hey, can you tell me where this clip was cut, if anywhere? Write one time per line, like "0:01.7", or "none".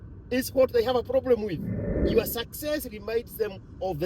0:02.0